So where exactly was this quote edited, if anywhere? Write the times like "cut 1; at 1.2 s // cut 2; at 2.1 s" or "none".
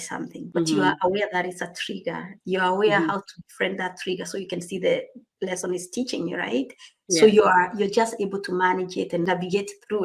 none